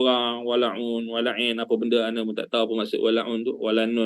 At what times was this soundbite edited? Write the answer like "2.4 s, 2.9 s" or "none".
none